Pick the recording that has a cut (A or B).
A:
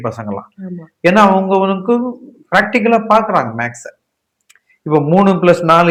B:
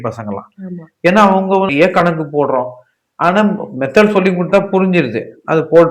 B